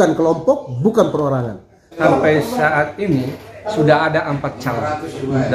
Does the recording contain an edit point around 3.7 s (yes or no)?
no